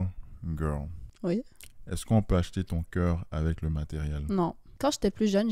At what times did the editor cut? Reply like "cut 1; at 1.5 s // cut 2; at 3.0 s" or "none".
cut 1; at 1.0 s // cut 2; at 4.7 s